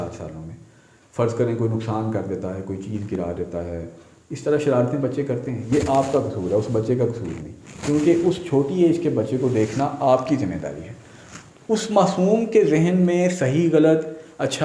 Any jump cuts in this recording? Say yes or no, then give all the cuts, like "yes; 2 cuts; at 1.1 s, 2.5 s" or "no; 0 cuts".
no; 0 cuts